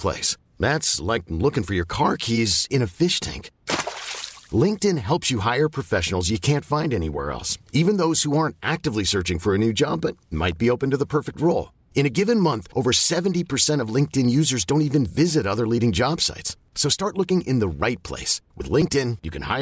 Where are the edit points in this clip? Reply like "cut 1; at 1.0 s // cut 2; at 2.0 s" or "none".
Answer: none